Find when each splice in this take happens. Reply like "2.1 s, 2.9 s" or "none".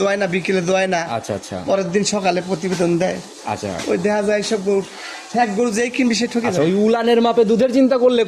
none